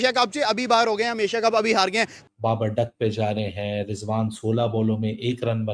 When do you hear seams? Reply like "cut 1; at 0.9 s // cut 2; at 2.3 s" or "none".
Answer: cut 1; at 2.2 s